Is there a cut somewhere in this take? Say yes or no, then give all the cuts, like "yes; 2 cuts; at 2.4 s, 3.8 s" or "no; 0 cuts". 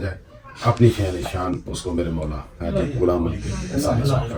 no; 0 cuts